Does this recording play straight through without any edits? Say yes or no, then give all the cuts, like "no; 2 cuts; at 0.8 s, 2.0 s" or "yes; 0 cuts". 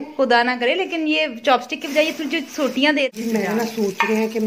no; 1 cut; at 3.1 s